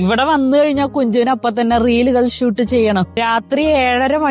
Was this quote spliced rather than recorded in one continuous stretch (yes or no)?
yes